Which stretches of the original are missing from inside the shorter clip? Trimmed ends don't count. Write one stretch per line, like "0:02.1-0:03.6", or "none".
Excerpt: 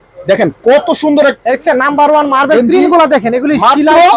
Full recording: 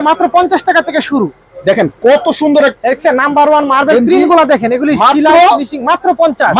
none